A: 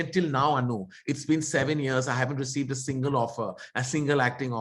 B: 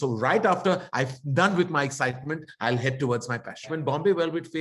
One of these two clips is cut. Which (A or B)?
B